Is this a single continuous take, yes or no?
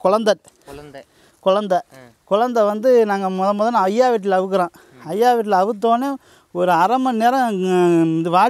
yes